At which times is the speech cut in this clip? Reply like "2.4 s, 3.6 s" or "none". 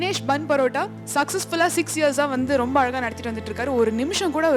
1.0 s